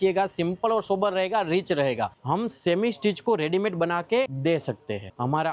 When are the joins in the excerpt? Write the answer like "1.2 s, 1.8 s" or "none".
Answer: 2.1 s